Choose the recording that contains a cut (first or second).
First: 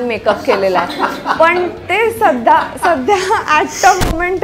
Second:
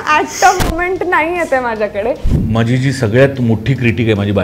second